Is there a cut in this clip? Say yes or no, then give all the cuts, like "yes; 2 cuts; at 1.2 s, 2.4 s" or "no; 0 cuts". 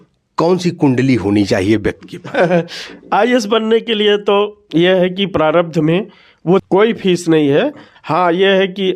yes; 1 cut; at 6.6 s